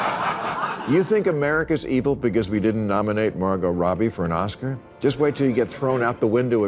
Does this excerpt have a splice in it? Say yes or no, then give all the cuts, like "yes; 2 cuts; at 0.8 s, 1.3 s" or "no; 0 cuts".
no; 0 cuts